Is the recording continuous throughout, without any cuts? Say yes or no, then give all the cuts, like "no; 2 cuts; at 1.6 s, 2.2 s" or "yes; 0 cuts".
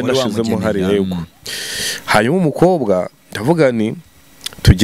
yes; 0 cuts